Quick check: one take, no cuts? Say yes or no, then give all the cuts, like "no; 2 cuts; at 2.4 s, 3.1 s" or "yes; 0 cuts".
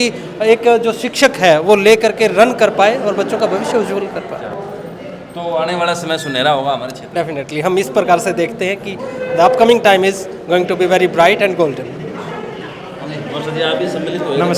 yes; 0 cuts